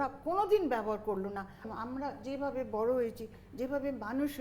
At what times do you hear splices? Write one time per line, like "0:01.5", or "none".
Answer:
0:01.7

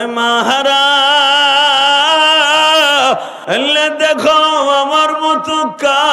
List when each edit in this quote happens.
0:03.3

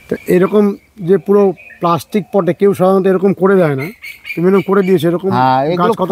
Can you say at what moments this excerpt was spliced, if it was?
none

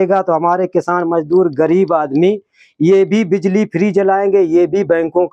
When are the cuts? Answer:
none

